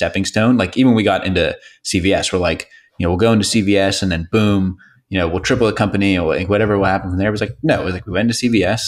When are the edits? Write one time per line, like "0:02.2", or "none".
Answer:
none